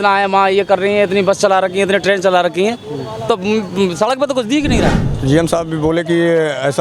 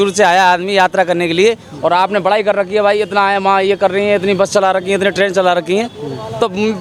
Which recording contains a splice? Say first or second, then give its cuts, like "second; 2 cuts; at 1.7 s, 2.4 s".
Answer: first; 1 cut; at 5.1 s